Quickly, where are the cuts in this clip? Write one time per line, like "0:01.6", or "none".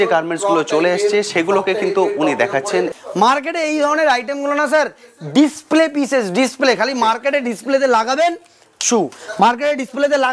0:02.9